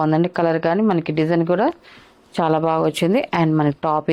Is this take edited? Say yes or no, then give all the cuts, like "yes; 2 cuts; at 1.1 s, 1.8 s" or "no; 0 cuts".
no; 0 cuts